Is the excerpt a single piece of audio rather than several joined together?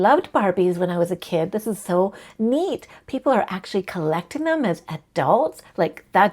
yes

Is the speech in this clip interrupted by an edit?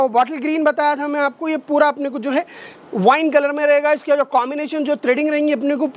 no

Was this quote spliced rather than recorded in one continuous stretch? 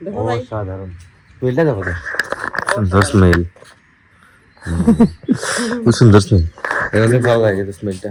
no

